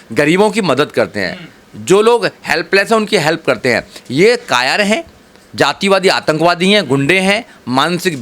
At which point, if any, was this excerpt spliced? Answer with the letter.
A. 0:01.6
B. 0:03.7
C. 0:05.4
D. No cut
D